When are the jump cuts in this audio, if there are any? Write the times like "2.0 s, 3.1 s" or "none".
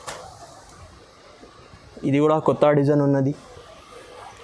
none